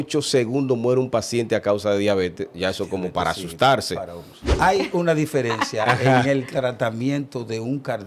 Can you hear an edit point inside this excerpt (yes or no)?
yes